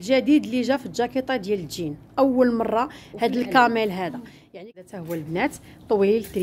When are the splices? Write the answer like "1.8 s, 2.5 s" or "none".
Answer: 4.7 s